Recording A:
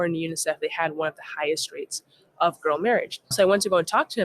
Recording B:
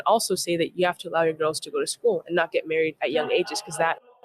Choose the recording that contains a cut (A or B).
A